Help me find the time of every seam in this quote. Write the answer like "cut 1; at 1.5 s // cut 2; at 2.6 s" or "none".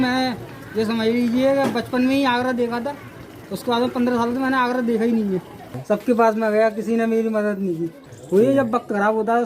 cut 1; at 5.8 s // cut 2; at 8.0 s

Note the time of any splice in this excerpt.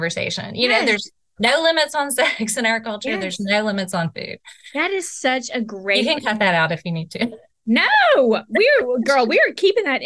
none

